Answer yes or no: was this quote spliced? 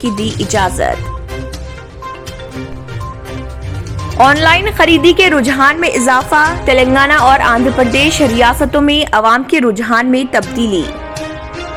no